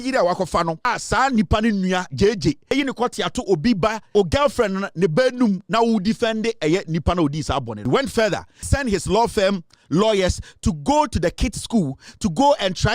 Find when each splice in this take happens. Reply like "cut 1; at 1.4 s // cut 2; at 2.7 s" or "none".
cut 1; at 0.8 s // cut 2; at 2.7 s // cut 3; at 4.1 s // cut 4; at 7.7 s // cut 5; at 8.6 s